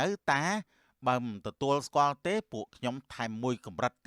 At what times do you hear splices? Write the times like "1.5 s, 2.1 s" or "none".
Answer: none